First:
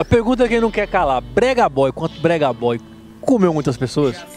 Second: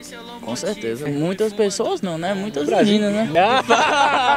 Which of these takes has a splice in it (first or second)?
second